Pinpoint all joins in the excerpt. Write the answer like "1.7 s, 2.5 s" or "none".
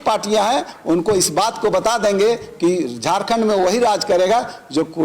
none